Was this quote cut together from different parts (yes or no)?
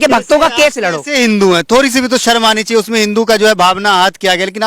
no